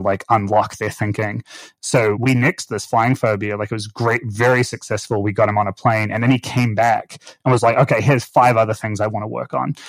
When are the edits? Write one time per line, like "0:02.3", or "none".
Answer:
0:02.2